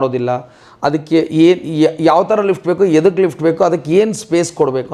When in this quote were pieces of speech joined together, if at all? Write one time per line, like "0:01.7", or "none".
none